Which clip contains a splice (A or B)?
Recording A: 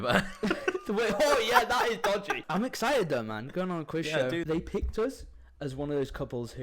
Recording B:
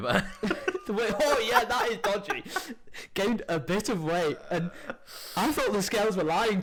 A